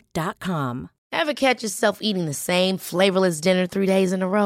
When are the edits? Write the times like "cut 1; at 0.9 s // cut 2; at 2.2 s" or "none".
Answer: cut 1; at 1.0 s